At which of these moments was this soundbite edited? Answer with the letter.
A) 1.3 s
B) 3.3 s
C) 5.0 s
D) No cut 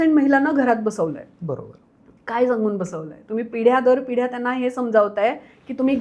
D